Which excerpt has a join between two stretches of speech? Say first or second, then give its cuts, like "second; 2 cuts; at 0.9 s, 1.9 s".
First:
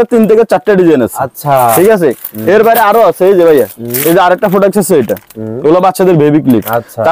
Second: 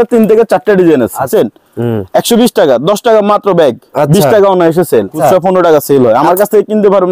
second; 2 cuts; at 1.3 s, 5.2 s